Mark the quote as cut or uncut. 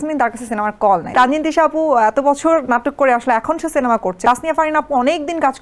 cut